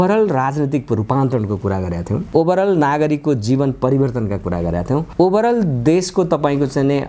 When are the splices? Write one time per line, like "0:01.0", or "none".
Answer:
0:02.3
0:05.1

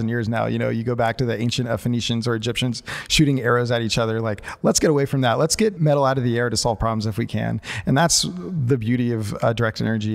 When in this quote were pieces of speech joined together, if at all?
0:05.8

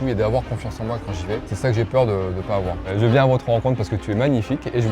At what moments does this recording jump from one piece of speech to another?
0:01.5
0:02.9

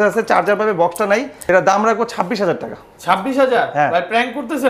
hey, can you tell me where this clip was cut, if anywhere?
0:01.4

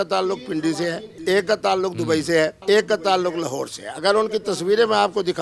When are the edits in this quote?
0:01.1
0:02.6

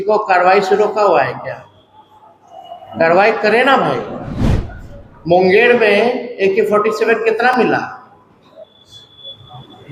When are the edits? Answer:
none

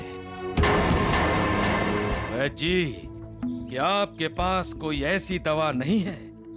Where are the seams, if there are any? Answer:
0:02.2

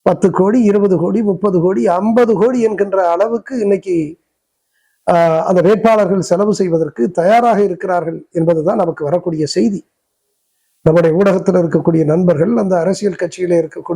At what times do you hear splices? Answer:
none

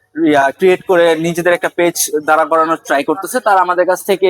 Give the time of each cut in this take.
none

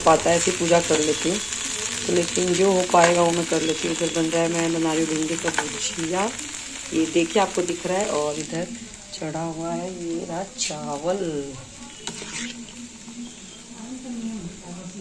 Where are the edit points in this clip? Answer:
none

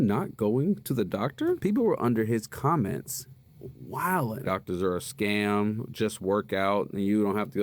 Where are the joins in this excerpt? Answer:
0:01.6
0:04.4

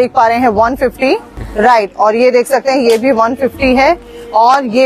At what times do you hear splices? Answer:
0:01.4

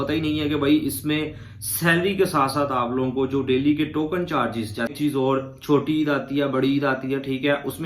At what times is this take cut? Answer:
0:04.9

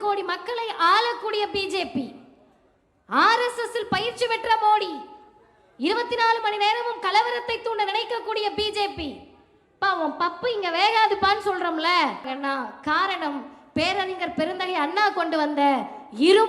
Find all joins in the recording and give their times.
0:12.3

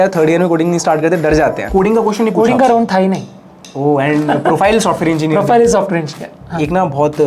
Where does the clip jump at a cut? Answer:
0:01.6
0:06.4

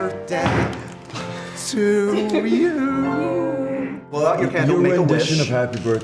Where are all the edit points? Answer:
0:04.0

